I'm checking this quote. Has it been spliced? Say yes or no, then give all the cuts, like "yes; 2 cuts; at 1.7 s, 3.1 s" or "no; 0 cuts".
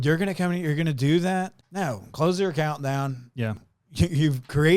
yes; 2 cuts; at 1.6 s, 3.6 s